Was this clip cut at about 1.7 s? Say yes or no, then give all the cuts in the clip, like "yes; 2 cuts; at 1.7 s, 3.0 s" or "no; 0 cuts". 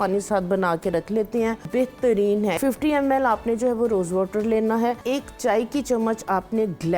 yes; 3 cuts; at 1.7 s, 2.6 s, 5.0 s